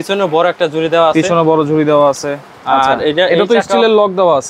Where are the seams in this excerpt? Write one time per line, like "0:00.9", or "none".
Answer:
none